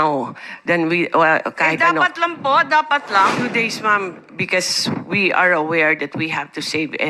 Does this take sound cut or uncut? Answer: cut